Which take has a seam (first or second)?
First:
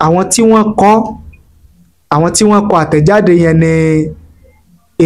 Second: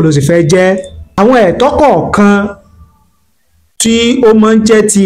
second